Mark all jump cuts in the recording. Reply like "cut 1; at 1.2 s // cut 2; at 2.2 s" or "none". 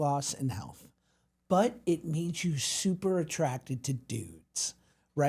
none